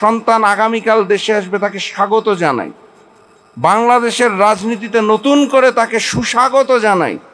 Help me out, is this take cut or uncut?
uncut